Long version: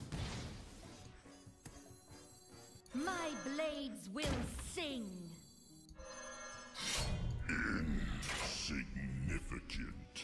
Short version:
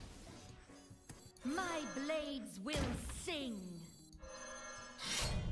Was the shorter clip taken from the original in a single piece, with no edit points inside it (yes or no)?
no